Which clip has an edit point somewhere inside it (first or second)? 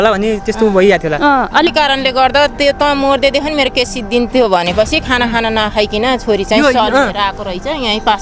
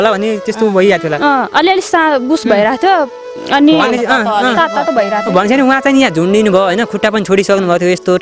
first